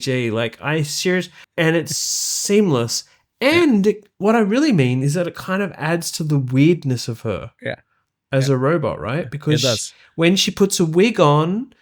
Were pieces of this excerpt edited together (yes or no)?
yes